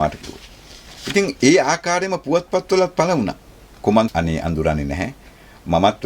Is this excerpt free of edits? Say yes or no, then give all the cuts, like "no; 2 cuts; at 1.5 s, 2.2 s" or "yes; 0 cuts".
no; 1 cut; at 4.1 s